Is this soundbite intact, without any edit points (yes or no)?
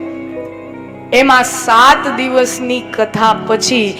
yes